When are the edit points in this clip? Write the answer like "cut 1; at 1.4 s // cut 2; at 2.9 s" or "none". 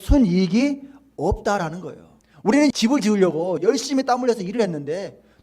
cut 1; at 2.6 s // cut 2; at 3.6 s

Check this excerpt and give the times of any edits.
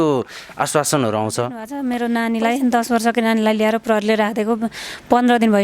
cut 1; at 1.7 s

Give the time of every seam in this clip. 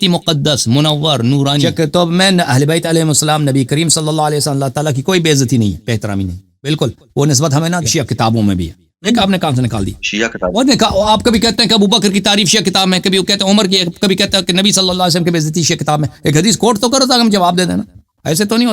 none

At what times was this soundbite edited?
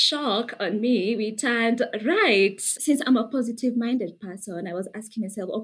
cut 1; at 2.7 s

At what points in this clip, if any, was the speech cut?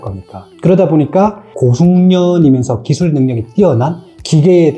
cut 1; at 1.4 s

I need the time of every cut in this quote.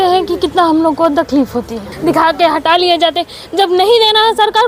cut 1; at 1.9 s

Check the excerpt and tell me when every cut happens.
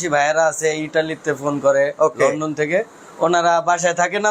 none

